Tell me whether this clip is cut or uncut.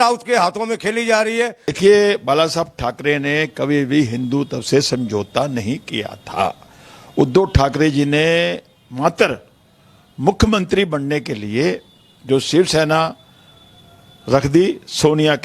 cut